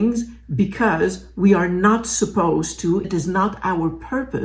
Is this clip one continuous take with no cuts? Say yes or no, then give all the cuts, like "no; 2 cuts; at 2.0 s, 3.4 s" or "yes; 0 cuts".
no; 1 cut; at 3.1 s